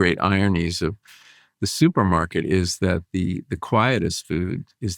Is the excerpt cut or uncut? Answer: uncut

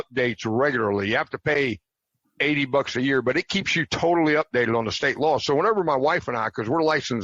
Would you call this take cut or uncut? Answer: uncut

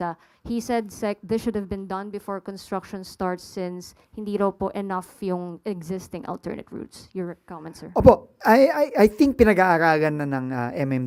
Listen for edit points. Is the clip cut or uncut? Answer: uncut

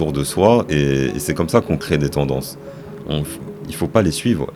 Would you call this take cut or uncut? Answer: uncut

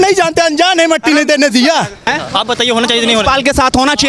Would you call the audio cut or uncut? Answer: cut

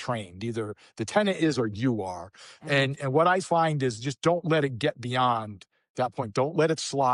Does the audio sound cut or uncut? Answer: uncut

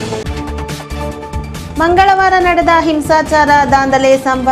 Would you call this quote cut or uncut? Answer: uncut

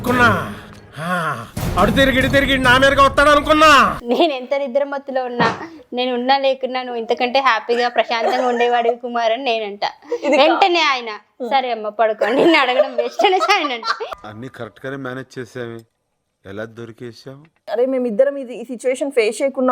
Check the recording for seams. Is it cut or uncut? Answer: cut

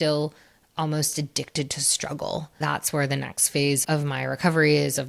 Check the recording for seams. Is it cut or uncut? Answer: cut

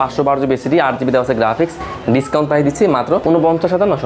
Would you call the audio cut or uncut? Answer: uncut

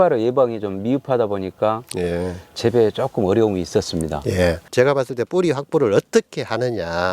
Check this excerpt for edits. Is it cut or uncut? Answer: cut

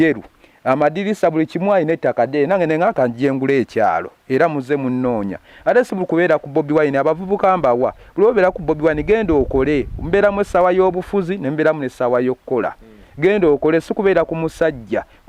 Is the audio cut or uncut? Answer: uncut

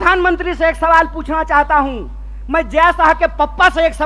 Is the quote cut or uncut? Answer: uncut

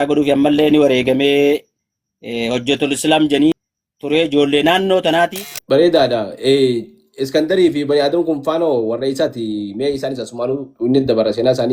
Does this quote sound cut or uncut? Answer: cut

